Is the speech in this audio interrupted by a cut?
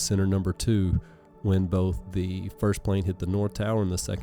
no; 0 cuts

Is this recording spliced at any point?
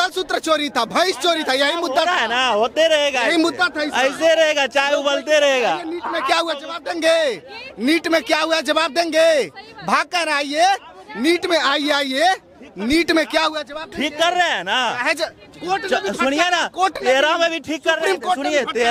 no; 0 cuts

